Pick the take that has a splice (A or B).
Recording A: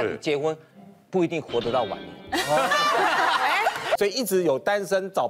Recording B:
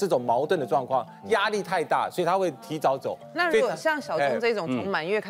A